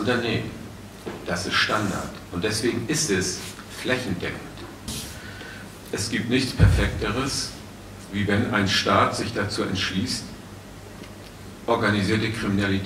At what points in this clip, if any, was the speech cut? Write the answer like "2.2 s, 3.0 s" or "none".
4.8 s